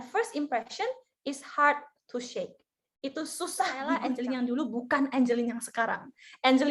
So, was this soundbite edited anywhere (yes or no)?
yes